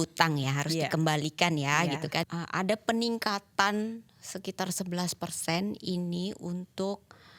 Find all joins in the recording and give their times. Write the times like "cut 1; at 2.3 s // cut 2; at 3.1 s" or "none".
cut 1; at 2.2 s